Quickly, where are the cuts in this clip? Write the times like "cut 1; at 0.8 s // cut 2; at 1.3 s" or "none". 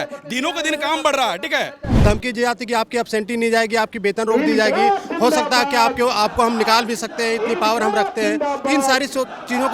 cut 1; at 2.0 s